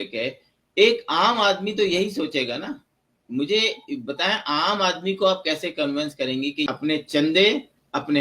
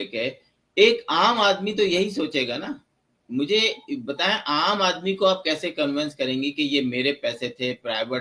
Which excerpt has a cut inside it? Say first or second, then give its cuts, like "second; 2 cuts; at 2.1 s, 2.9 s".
first; 1 cut; at 6.7 s